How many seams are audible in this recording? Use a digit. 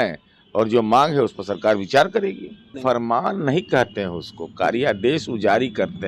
1